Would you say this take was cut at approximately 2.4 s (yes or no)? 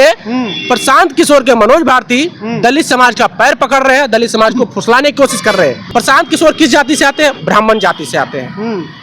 no